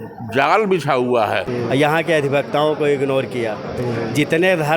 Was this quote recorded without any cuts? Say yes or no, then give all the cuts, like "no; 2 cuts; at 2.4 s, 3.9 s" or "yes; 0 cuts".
no; 1 cut; at 1.5 s